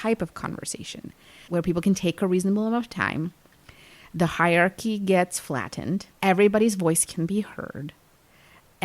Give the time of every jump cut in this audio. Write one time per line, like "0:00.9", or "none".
0:01.4